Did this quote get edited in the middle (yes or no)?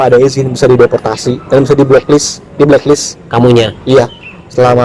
no